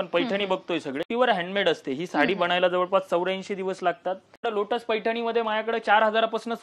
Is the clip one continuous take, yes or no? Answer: no